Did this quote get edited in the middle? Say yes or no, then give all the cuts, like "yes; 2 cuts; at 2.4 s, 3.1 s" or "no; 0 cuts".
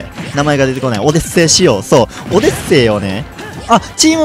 no; 0 cuts